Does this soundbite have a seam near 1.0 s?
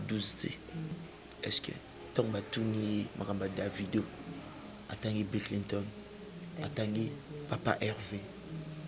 yes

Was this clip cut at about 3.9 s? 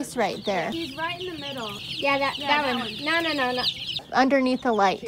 yes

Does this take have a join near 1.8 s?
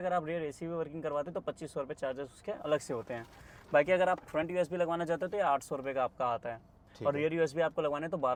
no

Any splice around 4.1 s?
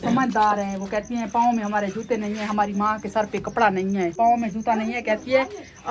yes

